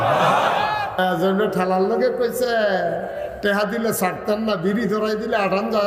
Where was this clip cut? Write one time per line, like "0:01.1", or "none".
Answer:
0:01.0